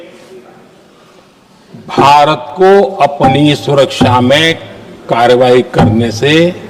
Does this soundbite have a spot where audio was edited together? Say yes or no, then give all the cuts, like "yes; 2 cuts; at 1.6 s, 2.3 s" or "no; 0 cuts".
no; 0 cuts